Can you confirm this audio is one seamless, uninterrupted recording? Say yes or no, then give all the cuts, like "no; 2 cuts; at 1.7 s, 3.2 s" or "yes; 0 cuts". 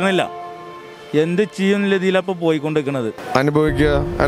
no; 1 cut; at 3.2 s